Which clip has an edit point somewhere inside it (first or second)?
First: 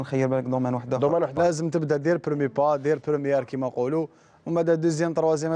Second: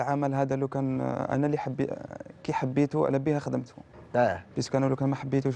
first